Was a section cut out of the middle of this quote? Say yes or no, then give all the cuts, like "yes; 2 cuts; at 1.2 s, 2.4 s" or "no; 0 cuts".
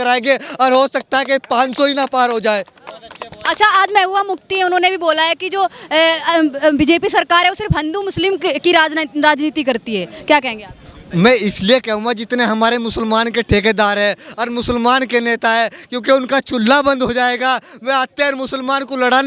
no; 0 cuts